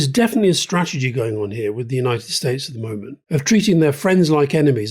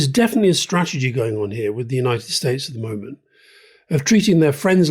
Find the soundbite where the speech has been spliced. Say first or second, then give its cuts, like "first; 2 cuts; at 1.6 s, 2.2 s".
first; 1 cut; at 3.1 s